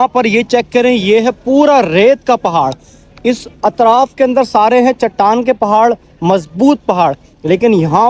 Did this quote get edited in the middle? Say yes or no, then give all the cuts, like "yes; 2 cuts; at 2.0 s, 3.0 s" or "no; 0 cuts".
no; 0 cuts